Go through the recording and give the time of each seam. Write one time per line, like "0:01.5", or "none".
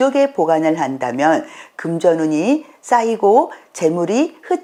none